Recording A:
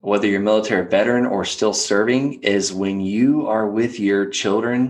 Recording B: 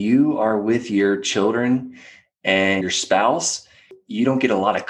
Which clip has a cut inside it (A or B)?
B